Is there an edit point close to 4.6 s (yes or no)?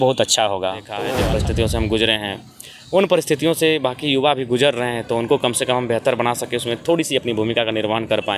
no